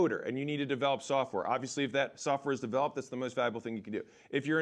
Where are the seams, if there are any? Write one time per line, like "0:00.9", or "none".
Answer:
none